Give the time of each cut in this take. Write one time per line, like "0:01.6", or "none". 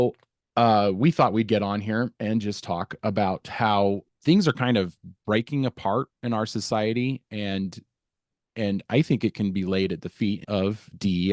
0:04.0
0:10.4